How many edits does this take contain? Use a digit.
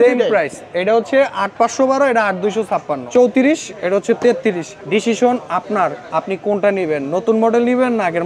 2